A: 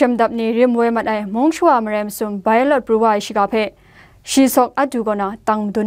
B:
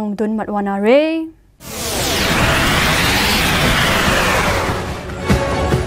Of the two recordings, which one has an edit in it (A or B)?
B